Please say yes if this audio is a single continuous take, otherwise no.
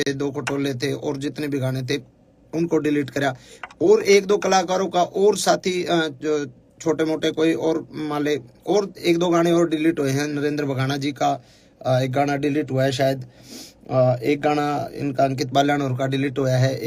yes